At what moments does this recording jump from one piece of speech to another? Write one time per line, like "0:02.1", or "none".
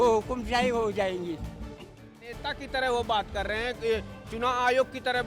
0:02.4